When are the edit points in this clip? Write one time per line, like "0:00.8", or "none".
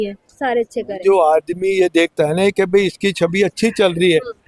0:01.0